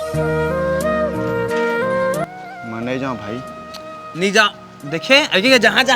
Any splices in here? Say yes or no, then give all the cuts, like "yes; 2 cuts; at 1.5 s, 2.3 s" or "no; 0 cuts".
yes; 1 cut; at 2.3 s